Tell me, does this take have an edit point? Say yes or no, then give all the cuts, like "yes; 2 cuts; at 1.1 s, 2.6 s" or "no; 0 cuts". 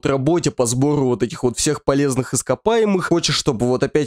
yes; 1 cut; at 3.0 s